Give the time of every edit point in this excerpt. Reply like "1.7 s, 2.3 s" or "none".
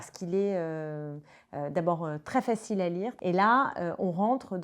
3.1 s